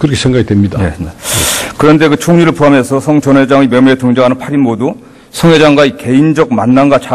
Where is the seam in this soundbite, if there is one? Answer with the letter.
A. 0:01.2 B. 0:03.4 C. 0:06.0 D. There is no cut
C